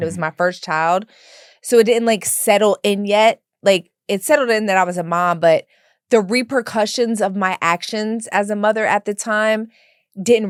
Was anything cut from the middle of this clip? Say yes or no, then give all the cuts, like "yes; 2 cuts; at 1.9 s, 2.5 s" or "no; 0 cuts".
no; 0 cuts